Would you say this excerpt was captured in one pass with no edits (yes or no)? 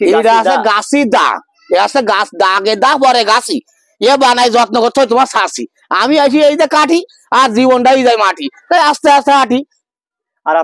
yes